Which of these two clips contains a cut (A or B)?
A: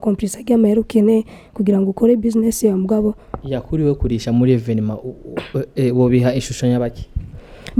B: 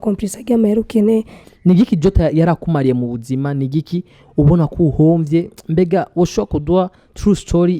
B